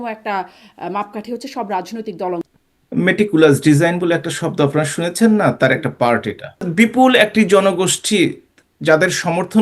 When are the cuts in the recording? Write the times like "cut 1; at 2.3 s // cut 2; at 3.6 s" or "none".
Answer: cut 1; at 2.5 s // cut 2; at 6.7 s